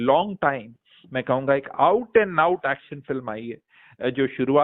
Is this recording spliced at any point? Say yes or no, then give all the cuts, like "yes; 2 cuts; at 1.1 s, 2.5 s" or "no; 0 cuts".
no; 0 cuts